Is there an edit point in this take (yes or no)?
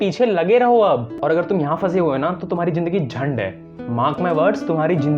yes